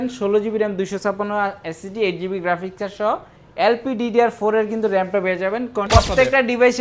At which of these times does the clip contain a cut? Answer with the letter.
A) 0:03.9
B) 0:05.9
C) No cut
B